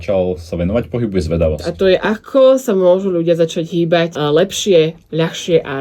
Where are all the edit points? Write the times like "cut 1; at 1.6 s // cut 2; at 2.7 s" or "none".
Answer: cut 1; at 1.7 s // cut 2; at 4.2 s